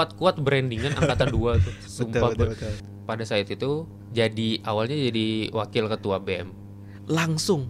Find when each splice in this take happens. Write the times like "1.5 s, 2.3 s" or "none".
2.9 s, 4.0 s